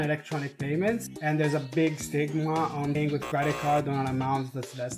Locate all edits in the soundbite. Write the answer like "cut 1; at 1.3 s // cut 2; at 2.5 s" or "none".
cut 1; at 2.8 s